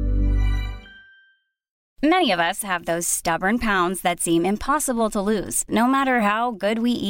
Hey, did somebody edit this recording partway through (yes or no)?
yes